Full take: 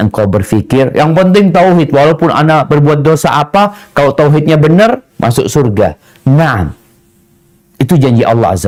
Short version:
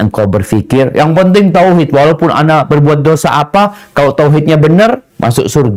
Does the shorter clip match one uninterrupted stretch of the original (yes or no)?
yes